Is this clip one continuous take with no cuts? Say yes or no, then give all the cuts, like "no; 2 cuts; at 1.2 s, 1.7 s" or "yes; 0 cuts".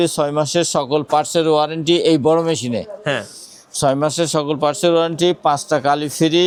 yes; 0 cuts